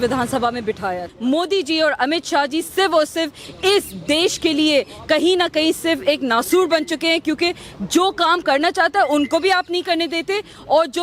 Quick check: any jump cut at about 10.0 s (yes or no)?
no